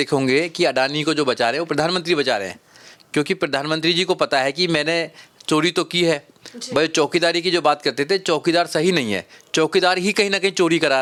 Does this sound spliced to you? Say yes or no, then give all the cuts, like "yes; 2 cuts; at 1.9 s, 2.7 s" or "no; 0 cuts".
no; 0 cuts